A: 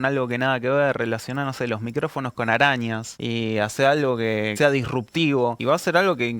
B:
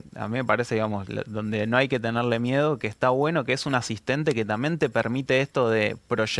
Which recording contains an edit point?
A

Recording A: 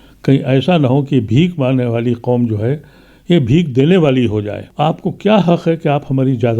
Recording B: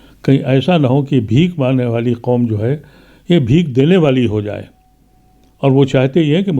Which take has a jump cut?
A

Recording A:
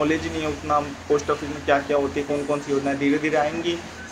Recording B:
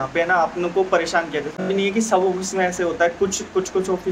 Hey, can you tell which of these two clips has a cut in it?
B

